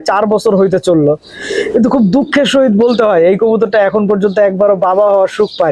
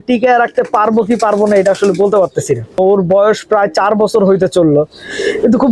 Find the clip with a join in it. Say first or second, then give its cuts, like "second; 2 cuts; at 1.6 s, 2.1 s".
second; 1 cut; at 2.8 s